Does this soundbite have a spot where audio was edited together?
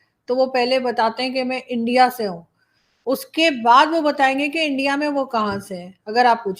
no; 0 cuts

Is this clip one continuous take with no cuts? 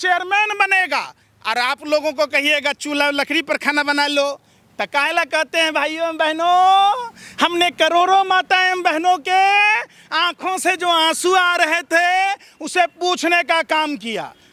yes; 0 cuts

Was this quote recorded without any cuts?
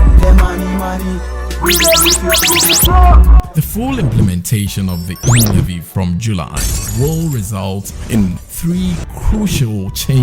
no; 1 cut; at 3.3 s

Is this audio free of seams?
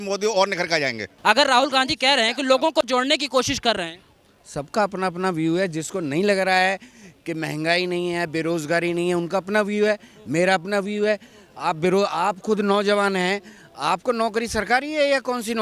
no; 1 cut; at 1.0 s

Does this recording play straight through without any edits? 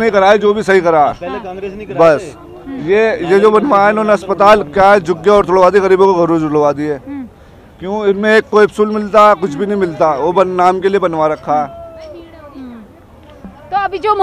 yes; 0 cuts

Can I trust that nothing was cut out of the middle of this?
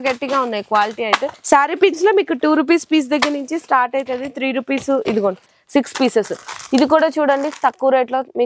no; 2 cuts; at 1.3 s, 5.5 s

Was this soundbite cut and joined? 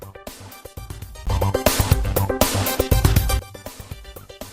yes; 2 cuts; at 1.2 s, 3.5 s

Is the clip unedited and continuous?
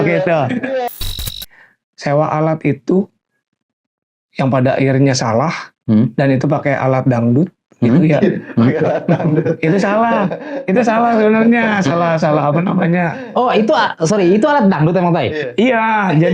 no; 1 cut; at 1.1 s

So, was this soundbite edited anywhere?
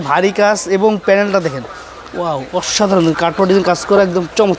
no; 0 cuts

